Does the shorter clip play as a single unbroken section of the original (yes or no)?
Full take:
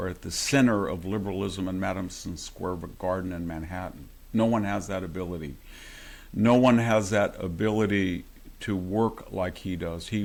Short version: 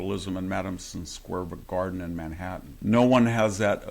no